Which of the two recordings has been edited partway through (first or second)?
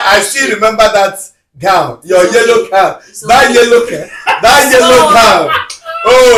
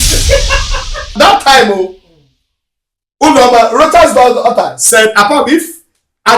second